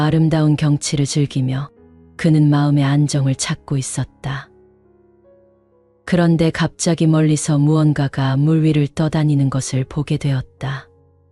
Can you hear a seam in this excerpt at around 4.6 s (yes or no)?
yes